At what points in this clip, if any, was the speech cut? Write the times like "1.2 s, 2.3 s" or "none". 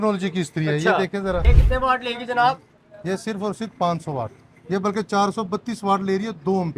1.4 s